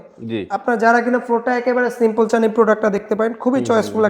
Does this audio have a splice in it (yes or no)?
no